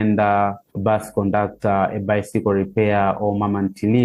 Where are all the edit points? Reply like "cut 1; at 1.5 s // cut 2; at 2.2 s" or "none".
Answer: none